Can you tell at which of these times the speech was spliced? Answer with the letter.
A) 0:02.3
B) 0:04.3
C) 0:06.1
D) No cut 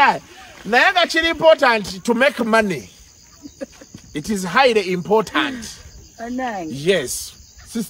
A